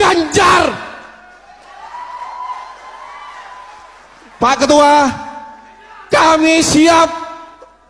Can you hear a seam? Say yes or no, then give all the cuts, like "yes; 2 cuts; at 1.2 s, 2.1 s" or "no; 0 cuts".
no; 0 cuts